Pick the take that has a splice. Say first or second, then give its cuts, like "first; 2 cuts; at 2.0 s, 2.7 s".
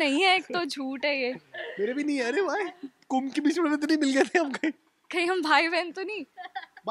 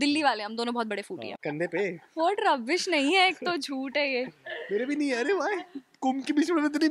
second; 1 cut; at 1.2 s